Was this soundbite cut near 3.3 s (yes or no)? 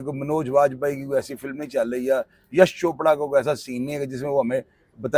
no